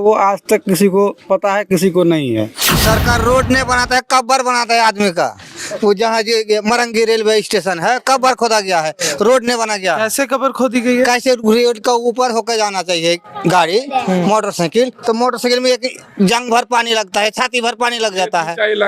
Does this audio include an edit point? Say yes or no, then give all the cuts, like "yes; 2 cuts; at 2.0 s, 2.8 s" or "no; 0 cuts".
yes; 1 cut; at 2.7 s